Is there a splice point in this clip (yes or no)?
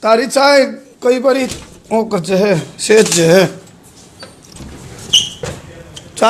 no